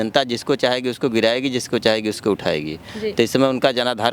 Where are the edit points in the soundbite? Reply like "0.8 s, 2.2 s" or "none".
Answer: none